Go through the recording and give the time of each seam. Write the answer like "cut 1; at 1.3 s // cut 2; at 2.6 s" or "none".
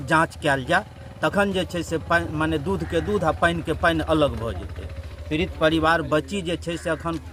none